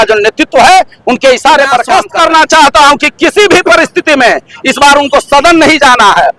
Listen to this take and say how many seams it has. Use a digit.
1